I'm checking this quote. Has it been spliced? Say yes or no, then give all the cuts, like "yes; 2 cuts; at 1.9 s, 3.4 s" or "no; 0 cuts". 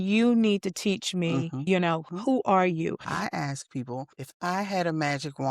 yes; 3 cuts; at 1.9 s, 3.1 s, 4.2 s